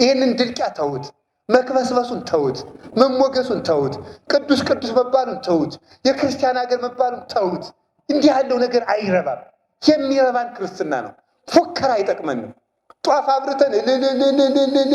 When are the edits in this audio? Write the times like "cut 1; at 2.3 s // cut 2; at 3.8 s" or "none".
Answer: none